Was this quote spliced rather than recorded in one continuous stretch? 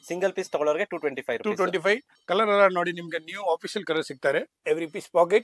yes; 2 cuts; at 2.1 s, 4.5 s

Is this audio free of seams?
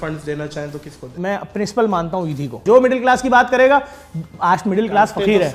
no; 2 cuts; at 1.1 s, 2.6 s

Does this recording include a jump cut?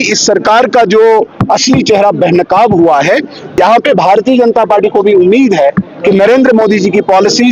yes; 1 cut; at 3.4 s

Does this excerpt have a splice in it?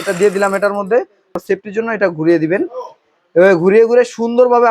yes; 1 cut; at 1.4 s

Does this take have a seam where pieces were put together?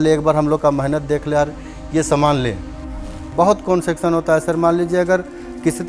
yes; 1 cut; at 3.2 s

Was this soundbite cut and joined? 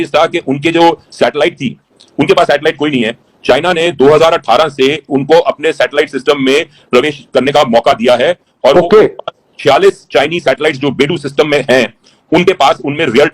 no; 0 cuts

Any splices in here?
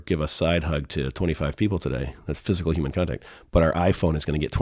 no; 0 cuts

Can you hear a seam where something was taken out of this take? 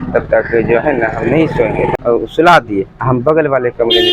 yes; 1 cut; at 1.9 s

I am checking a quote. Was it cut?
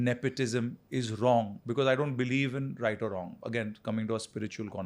no; 0 cuts

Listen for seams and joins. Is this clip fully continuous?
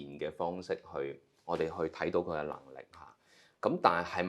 yes; 0 cuts

